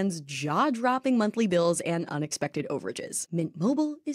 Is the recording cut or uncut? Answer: uncut